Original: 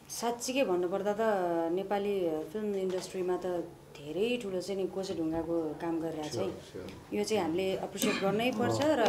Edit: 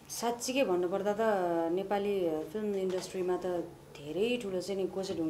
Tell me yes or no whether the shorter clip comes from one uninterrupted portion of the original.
yes